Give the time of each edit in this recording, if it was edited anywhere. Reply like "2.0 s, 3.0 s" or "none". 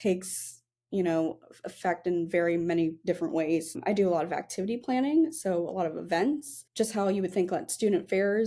3.8 s, 6.6 s